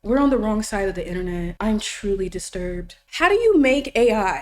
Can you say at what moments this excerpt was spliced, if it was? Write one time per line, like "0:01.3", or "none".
0:01.5
0:03.0